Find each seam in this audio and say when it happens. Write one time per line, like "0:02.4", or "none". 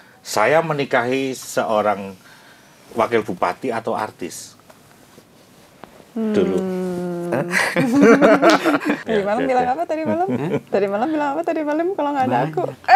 0:09.0